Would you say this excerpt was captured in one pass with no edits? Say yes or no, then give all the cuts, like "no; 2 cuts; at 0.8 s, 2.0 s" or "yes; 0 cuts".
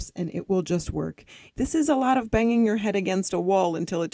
no; 1 cut; at 1.4 s